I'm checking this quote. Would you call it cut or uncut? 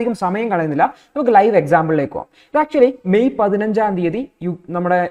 uncut